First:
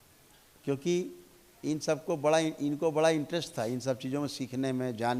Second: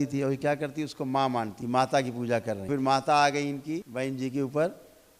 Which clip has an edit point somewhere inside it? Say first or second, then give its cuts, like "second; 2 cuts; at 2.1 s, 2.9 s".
second; 3 cuts; at 1.6 s, 2.7 s, 3.9 s